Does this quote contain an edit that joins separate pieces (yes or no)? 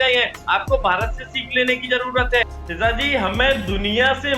yes